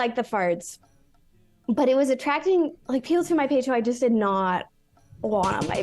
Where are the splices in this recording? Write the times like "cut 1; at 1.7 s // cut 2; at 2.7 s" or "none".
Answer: cut 1; at 2.8 s

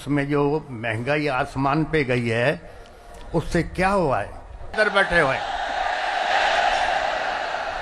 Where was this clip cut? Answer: cut 1; at 4.7 s

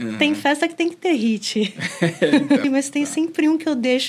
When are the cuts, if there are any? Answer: cut 1; at 2.6 s

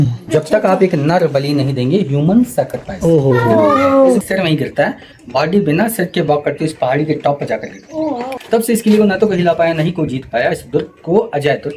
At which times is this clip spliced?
cut 1; at 4.2 s // cut 2; at 8.3 s

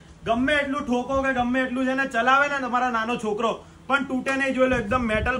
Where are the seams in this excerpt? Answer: none

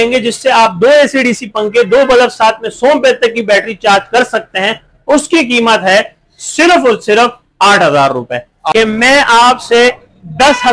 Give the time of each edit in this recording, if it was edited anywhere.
cut 1; at 8.5 s

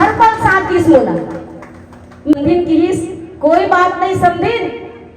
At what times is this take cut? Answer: cut 1; at 2.3 s

